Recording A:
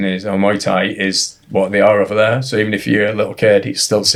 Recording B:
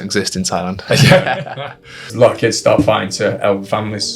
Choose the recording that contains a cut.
B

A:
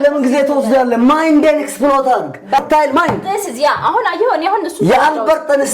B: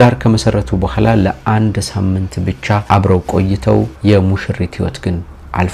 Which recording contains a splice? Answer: A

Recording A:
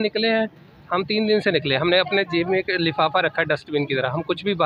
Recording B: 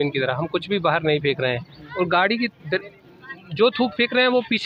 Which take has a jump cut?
B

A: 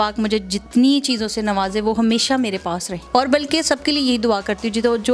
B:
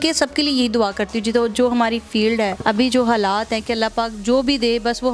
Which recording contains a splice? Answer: B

